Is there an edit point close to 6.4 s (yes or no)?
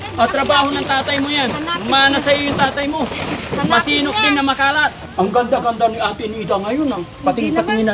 no